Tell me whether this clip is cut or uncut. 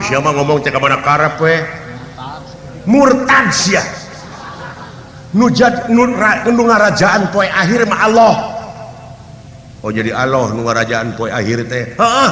uncut